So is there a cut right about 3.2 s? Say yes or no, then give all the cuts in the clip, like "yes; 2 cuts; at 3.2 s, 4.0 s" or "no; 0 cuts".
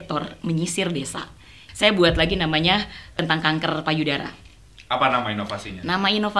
yes; 2 cuts; at 1.5 s, 3.2 s